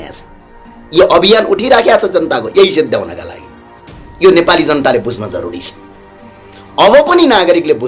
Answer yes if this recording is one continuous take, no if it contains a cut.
yes